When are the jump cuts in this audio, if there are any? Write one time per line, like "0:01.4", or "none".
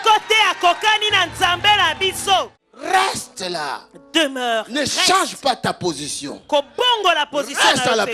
0:02.6

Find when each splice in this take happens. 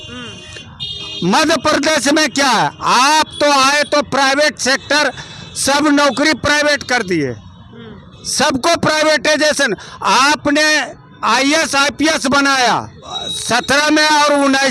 none

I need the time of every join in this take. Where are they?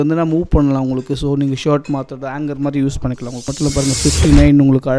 0:03.5

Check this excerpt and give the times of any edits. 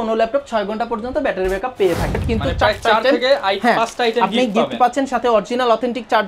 0:02.2

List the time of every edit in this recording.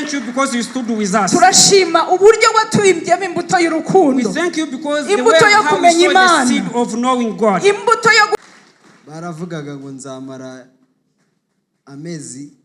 0:08.4

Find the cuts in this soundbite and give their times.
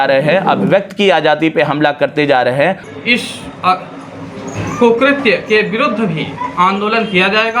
0:02.8

